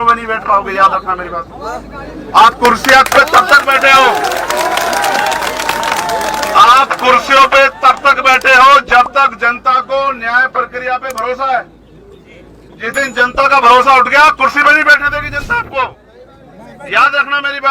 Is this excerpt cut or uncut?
uncut